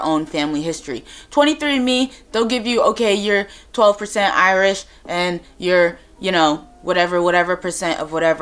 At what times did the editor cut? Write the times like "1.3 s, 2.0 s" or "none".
none